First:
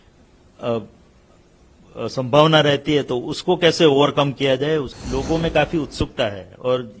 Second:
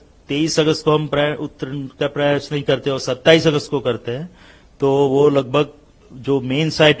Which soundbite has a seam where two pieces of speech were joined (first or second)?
first